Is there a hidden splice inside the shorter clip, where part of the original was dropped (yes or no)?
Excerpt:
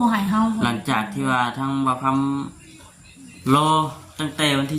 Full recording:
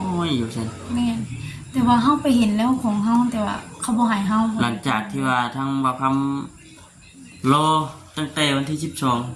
no